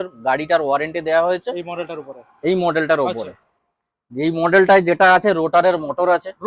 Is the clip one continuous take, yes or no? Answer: yes